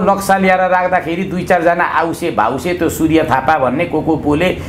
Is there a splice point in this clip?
no; 0 cuts

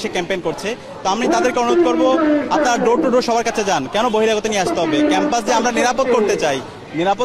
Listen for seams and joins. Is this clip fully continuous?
yes; 0 cuts

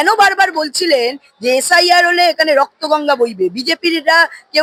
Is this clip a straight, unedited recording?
yes; 0 cuts

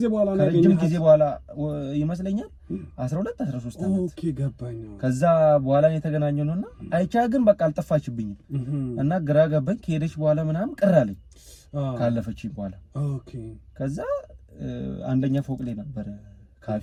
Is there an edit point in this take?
no; 0 cuts

